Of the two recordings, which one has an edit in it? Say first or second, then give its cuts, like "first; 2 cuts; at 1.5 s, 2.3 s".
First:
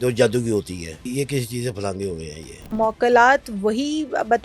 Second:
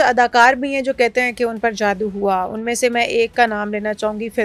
first; 2 cuts; at 1.1 s, 2.7 s